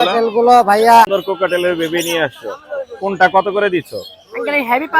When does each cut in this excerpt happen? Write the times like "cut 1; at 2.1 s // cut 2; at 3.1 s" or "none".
cut 1; at 1.1 s